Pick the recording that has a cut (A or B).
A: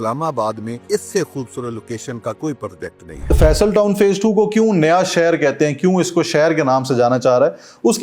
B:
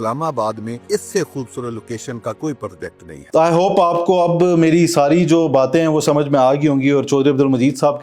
A